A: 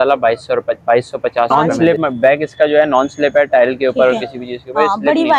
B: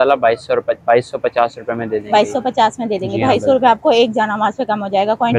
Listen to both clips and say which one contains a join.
A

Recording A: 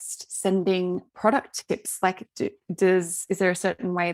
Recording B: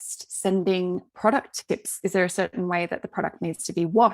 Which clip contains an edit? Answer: B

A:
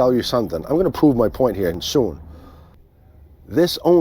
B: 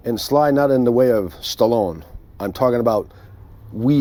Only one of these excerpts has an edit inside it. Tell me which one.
A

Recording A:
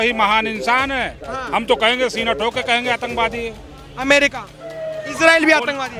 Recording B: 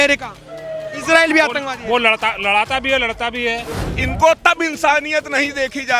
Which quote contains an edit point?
B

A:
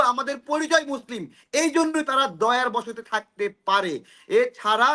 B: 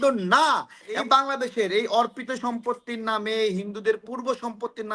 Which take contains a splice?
B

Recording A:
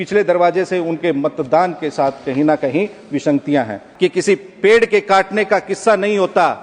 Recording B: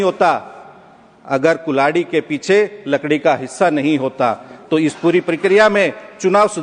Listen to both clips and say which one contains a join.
A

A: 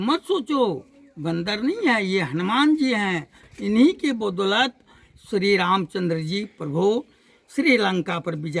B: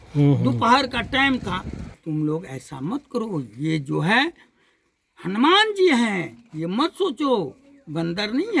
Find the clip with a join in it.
B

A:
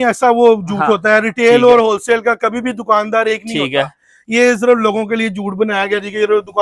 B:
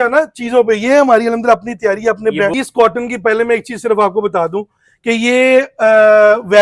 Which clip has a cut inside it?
B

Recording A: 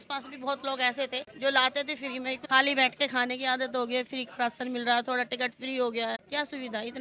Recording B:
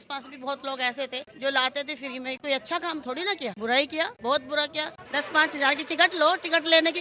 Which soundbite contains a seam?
A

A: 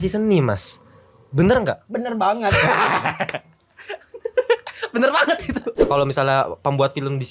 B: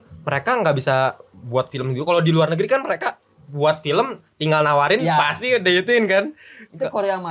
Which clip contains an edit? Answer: A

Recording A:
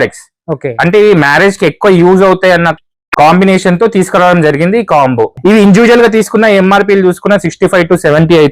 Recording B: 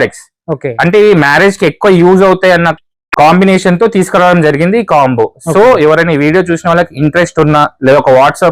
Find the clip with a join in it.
A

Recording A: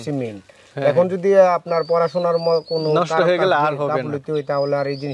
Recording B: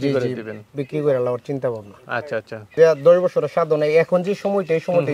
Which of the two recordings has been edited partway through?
B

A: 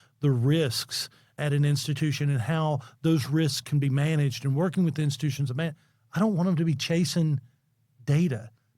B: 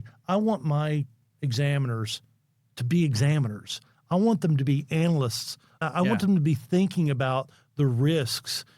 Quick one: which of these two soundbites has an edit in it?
B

